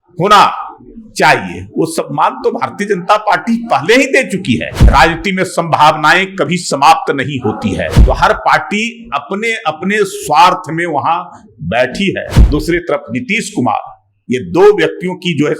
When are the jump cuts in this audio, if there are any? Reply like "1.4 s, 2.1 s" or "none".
4.7 s, 8.0 s, 12.3 s